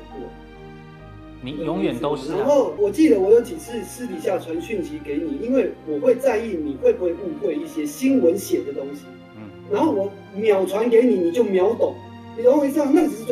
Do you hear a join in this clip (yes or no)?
no